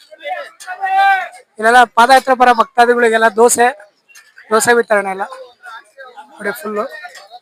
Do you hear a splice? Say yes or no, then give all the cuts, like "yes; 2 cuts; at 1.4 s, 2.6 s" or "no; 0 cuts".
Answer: no; 0 cuts